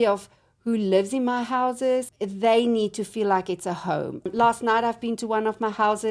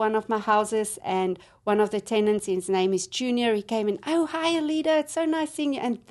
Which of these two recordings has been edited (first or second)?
first